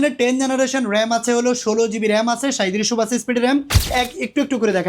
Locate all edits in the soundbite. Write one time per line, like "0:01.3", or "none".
0:03.9